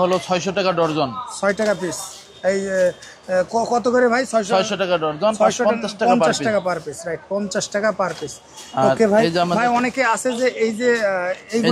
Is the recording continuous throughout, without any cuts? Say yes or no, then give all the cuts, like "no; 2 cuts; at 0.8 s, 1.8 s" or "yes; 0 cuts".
yes; 0 cuts